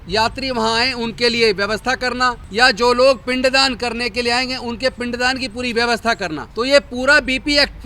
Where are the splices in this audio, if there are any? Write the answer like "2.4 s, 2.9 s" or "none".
2.4 s, 6.5 s